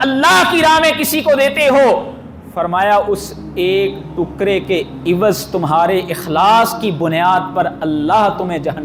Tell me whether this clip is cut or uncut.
uncut